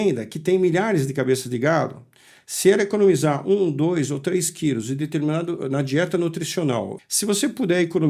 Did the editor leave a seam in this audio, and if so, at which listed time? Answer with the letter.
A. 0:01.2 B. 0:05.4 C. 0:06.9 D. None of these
C